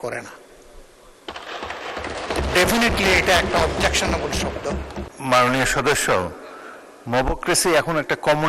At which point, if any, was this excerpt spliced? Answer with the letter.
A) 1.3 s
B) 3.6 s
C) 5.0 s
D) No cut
C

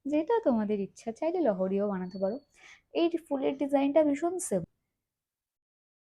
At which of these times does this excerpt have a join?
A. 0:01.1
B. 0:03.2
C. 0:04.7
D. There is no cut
C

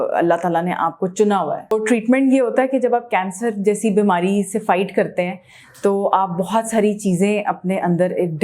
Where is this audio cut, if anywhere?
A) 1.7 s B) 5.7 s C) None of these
A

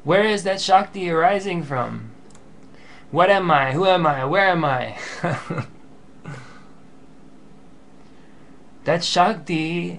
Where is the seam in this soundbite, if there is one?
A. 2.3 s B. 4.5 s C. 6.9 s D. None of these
C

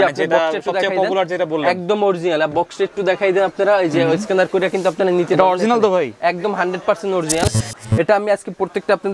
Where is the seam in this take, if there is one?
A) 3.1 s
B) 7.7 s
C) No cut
B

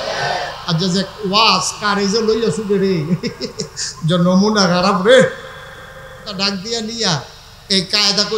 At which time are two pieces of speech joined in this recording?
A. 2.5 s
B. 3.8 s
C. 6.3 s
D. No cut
C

